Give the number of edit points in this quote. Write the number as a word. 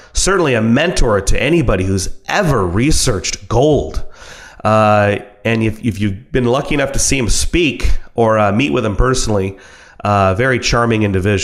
zero